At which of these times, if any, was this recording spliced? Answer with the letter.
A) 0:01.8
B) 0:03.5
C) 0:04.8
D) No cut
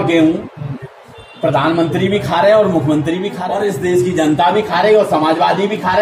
B